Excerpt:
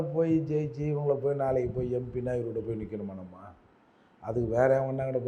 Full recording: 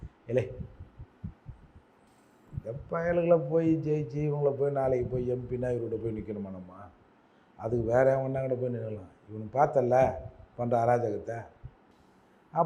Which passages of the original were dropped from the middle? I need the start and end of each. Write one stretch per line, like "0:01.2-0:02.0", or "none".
none

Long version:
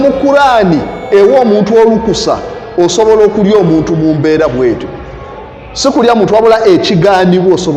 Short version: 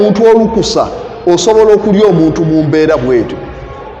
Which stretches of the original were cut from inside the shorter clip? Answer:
none

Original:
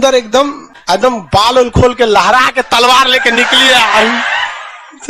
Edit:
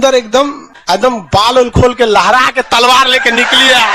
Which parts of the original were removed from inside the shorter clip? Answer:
none

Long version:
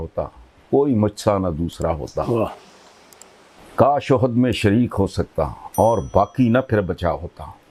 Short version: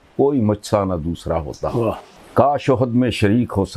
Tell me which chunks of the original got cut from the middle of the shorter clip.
0:02.7-0:03.6

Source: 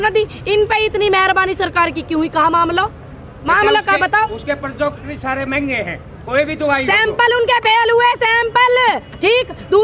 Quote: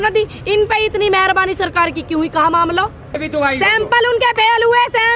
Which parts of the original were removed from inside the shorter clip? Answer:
0:03.2-0:06.5

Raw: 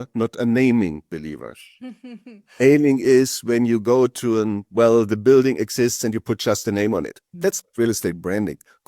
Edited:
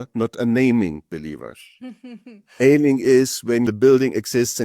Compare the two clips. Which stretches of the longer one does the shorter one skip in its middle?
0:03.7-0:05.1

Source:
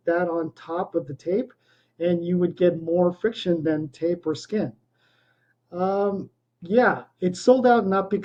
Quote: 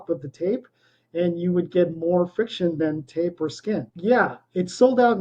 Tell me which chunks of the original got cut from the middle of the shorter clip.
0:04.8-0:06.6

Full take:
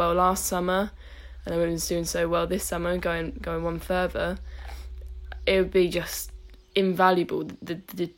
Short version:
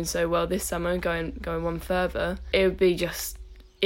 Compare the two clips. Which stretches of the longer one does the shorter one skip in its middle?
0:04.4-0:05.3

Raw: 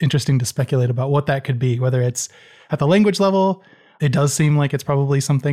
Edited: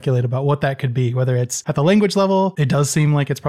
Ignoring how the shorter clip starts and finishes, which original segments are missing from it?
0:02.2-0:02.6
0:03.6-0:04.0

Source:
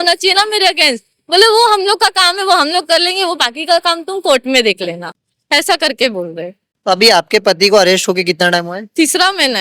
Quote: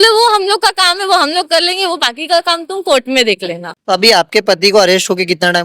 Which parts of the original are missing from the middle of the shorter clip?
0:05.1-0:06.7

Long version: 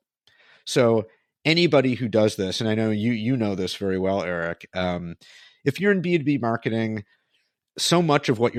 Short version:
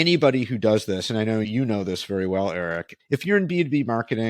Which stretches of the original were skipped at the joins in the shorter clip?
0:03.0-0:03.2
0:04.6-0:05.4

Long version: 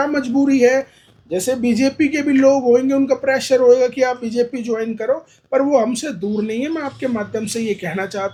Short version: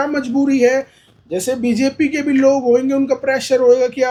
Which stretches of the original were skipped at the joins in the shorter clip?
none

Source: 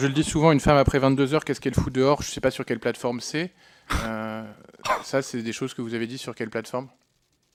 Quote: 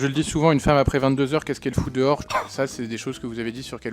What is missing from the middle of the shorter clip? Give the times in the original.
0:02.2-0:04.8

